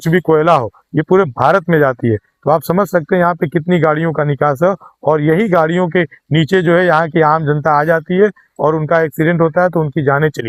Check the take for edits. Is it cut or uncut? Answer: uncut